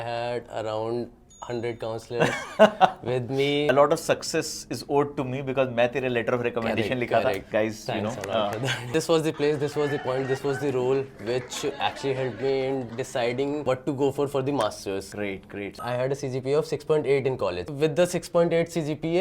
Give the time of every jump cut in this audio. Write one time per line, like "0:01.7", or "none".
0:03.7
0:07.5
0:08.9
0:15.7
0:17.6

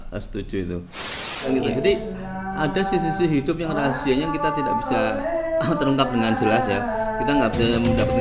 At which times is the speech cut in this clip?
0:01.5

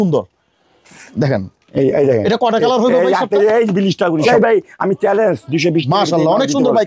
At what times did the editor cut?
0:04.2

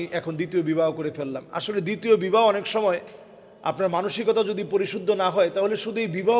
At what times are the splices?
none

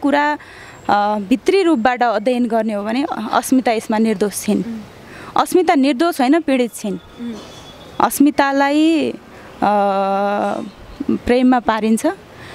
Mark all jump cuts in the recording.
none

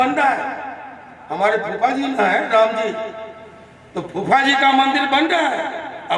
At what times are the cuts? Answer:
none

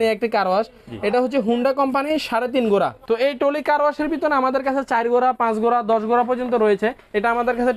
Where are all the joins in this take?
0:03.0

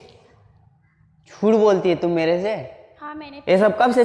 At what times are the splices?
none

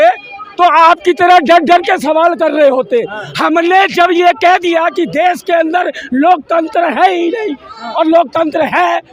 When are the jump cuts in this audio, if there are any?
none

